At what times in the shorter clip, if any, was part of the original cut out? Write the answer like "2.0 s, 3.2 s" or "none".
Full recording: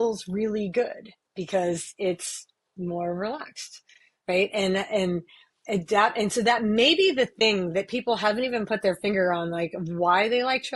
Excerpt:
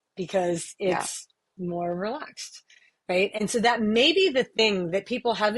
3.4 s